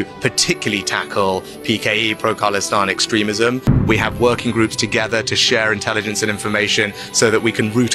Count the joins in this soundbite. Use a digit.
1